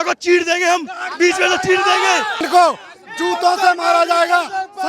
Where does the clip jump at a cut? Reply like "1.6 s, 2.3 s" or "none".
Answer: 2.4 s